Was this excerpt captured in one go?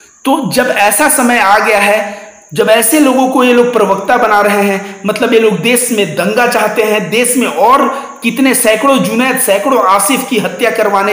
yes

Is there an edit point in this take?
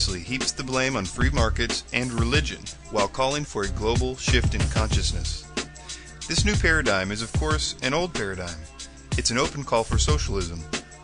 yes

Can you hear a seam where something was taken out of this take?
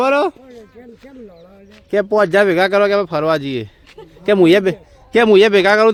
no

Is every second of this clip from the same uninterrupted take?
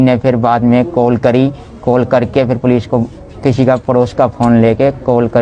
yes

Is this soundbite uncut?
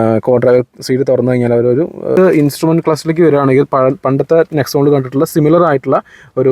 no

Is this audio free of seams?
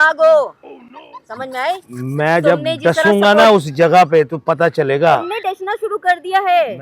yes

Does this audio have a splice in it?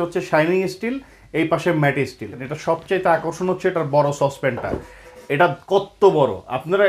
yes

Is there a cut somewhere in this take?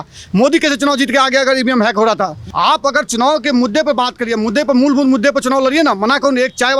yes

